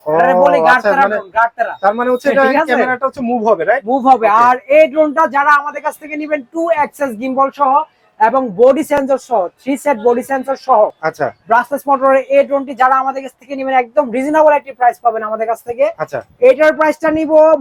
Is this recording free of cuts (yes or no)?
yes